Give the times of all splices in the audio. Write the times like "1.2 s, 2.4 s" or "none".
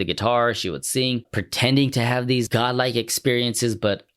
1.4 s, 2.5 s